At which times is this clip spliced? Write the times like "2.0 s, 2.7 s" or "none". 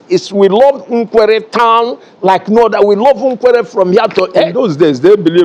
4.5 s